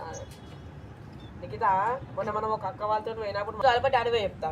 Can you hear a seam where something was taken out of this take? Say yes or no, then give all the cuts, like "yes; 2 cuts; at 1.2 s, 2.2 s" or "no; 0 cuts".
yes; 1 cut; at 3.6 s